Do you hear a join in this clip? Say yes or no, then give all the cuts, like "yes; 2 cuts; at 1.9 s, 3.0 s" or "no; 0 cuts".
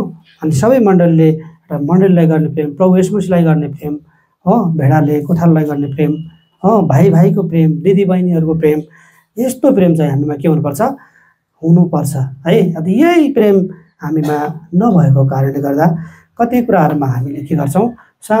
no; 0 cuts